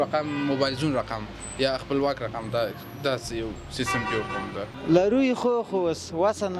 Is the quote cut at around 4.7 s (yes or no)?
yes